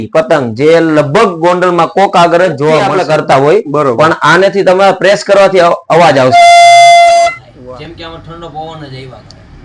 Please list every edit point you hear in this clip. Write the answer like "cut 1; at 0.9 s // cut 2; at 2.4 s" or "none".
cut 1; at 3.3 s // cut 2; at 7.2 s